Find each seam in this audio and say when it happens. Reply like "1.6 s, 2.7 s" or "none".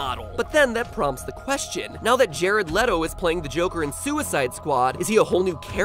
none